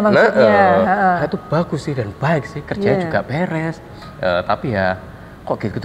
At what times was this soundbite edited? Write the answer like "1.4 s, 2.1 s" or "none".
4.0 s